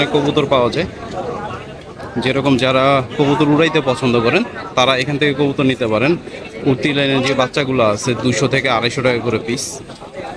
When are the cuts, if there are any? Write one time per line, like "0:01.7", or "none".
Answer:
none